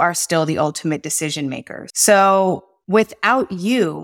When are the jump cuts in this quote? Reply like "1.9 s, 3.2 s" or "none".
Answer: 1.8 s